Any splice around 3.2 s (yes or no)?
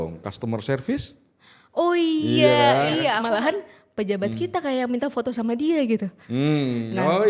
yes